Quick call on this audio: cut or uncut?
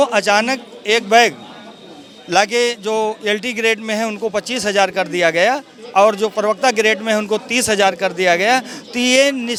uncut